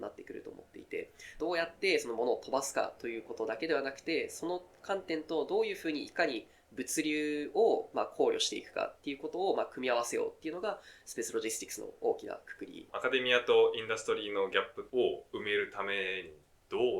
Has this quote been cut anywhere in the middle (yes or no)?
yes